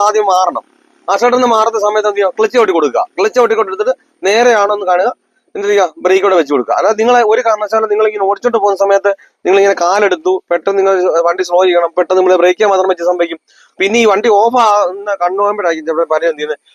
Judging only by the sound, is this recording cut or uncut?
uncut